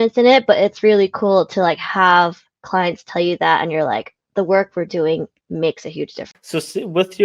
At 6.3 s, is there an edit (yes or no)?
yes